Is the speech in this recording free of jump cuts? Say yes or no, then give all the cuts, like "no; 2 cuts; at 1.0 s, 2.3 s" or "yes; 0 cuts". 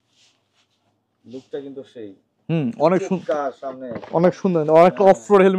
yes; 0 cuts